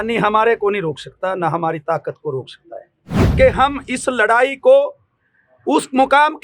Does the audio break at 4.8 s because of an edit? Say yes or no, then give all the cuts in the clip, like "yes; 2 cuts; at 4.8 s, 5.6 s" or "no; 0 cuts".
no; 1 cut; at 3.2 s